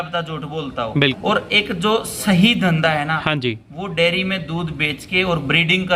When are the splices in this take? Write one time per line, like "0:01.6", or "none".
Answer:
0:01.2